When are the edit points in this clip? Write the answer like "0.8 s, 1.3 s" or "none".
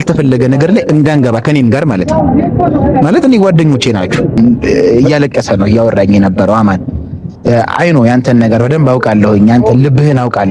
4.4 s